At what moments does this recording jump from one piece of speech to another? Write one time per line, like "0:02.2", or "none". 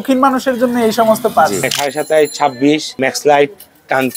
0:01.8
0:02.9